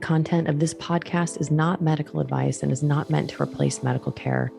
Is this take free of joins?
yes; 0 cuts

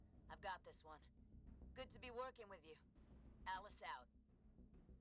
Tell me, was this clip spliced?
yes; 1 cut; at 4.1 s

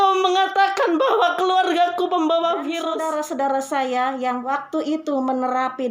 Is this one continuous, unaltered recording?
no; 2 cuts; at 2.9 s, 4.4 s

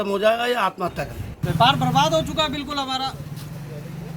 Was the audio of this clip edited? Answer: yes; 1 cut; at 1.3 s

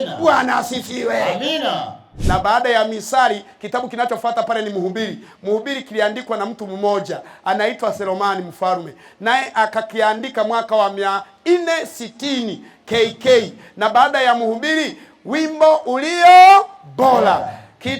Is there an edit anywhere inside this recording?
yes; 1 cut; at 2.1 s

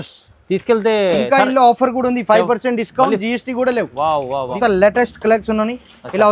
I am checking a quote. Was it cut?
yes; 1 cut; at 4.6 s

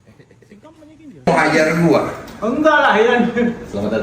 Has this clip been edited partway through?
yes; 1 cut; at 1.3 s

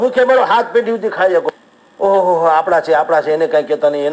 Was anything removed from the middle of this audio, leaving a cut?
yes; 1 cut; at 1.6 s

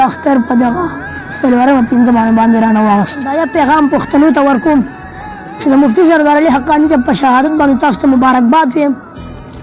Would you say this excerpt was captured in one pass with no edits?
no; 1 cut; at 3.3 s

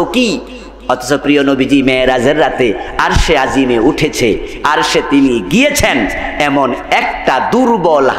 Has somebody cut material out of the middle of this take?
no; 0 cuts

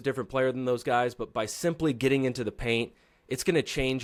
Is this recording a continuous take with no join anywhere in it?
yes; 0 cuts

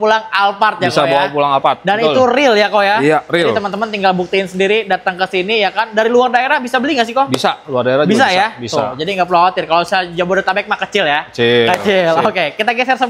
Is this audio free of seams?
yes; 0 cuts

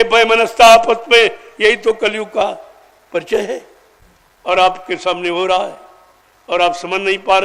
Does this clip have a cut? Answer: no; 0 cuts

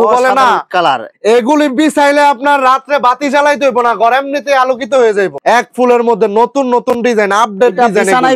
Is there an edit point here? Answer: no; 0 cuts

